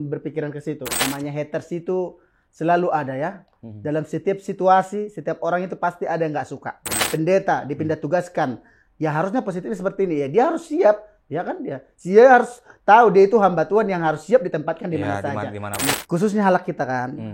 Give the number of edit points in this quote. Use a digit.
3